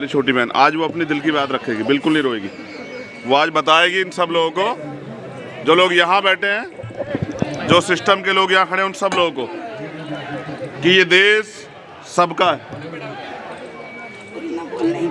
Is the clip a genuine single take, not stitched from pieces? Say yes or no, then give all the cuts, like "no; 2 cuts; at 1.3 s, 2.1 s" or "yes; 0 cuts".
yes; 0 cuts